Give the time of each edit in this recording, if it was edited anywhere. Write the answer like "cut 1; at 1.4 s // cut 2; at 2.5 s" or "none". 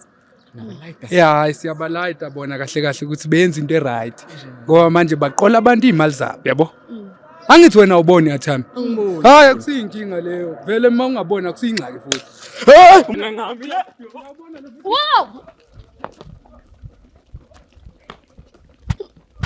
none